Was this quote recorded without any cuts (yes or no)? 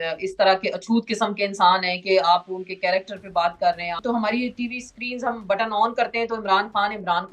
no